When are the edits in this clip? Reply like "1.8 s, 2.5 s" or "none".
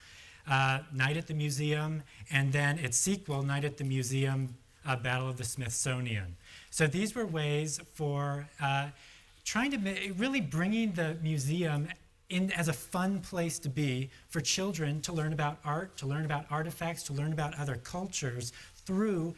none